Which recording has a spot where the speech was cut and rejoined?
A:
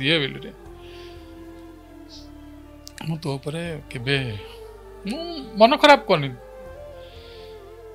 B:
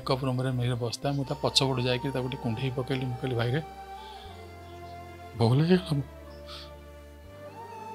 B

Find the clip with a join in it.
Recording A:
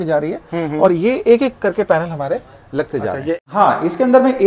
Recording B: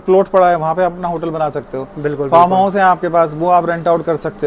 A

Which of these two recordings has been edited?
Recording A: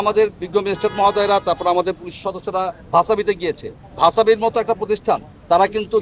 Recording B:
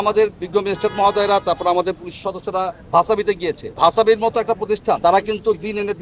B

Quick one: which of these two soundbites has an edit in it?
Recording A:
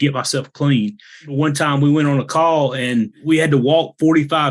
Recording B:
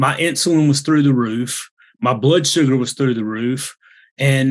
A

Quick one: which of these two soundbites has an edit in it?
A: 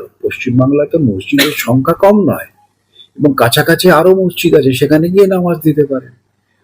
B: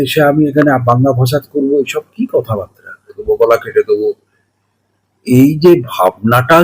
B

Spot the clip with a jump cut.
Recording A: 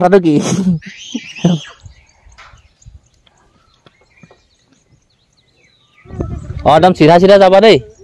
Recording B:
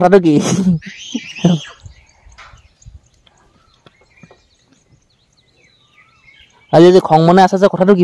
A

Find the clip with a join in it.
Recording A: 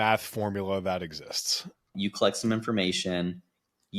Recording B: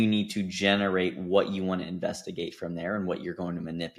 A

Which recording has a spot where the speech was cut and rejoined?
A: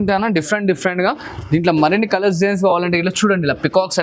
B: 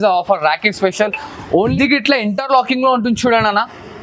B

